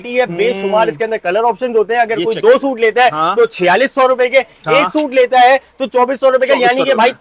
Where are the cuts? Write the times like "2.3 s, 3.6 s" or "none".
none